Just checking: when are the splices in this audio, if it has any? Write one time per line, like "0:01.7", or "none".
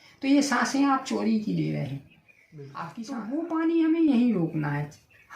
0:02.7